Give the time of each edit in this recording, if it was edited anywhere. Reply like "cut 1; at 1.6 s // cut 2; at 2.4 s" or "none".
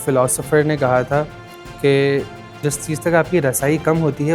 cut 1; at 2.6 s